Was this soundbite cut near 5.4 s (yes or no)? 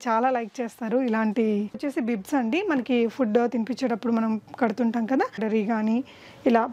yes